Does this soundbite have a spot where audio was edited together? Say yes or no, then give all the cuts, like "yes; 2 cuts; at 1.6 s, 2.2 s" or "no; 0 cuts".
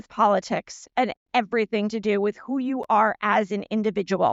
no; 0 cuts